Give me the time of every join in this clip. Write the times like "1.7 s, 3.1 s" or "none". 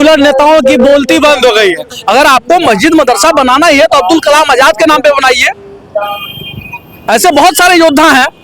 1.9 s